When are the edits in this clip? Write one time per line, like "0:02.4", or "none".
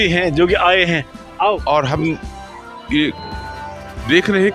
0:01.6